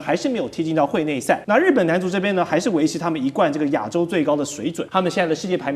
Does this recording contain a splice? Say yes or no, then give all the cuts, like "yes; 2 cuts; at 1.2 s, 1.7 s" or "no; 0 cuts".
yes; 2 cuts; at 1.4 s, 4.8 s